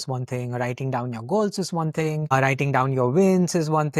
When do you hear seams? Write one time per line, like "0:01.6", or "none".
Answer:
none